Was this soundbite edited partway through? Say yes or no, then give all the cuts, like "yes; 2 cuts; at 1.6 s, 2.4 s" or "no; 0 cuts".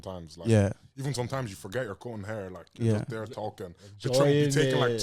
no; 0 cuts